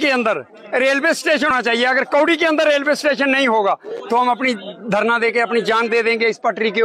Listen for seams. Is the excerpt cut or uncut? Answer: cut